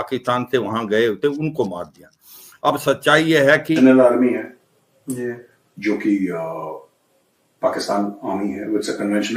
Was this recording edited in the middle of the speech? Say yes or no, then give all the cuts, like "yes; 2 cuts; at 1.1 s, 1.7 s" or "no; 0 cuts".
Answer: yes; 1 cut; at 3.8 s